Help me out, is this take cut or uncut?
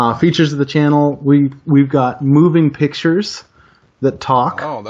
uncut